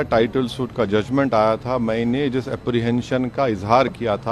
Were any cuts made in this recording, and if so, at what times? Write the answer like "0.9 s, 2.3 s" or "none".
none